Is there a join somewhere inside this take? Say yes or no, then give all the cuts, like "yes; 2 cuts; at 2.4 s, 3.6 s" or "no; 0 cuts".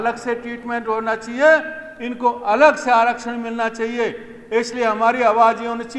no; 0 cuts